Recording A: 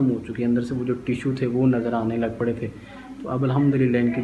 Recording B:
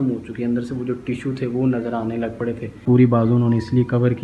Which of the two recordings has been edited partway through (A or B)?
B